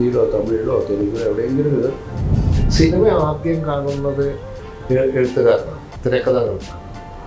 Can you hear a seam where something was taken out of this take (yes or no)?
yes